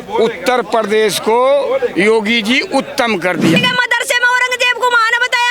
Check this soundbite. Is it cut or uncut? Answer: cut